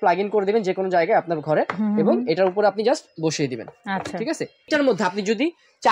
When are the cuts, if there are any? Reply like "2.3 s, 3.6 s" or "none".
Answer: 4.7 s